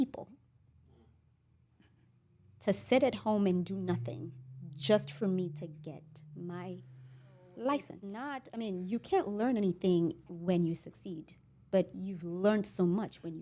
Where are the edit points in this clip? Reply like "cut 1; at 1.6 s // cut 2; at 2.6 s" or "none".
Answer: cut 1; at 8.4 s